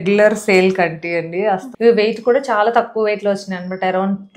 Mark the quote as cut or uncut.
cut